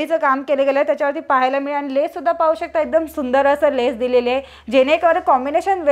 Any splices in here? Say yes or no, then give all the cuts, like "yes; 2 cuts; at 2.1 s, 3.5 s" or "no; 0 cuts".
no; 0 cuts